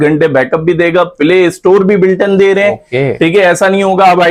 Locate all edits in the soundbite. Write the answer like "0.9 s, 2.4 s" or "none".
none